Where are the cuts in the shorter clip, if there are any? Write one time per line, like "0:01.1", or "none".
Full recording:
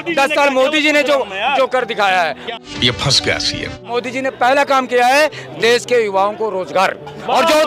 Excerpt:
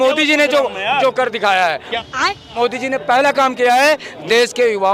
0:02.2